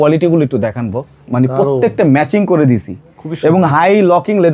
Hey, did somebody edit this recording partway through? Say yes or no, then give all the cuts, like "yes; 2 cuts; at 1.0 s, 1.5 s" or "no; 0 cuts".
no; 0 cuts